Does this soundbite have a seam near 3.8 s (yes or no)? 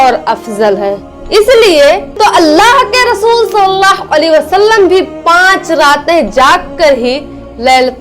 no